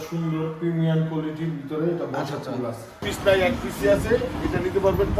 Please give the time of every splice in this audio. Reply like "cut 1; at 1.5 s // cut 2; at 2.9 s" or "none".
cut 1; at 3.1 s